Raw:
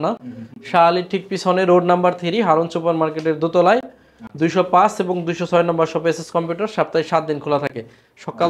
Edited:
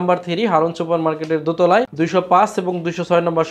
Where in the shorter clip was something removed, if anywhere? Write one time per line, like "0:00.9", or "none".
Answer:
0:01.9